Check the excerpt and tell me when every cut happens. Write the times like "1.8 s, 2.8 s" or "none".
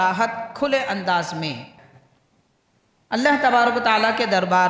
1.7 s